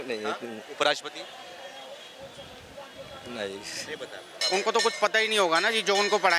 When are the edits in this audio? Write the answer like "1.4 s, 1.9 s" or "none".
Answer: 4.3 s